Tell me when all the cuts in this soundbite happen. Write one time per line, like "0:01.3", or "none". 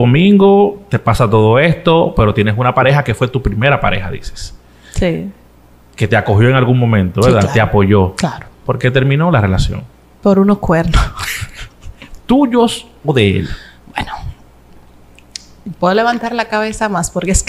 none